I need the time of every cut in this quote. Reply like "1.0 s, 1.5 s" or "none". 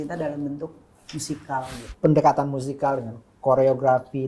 1.8 s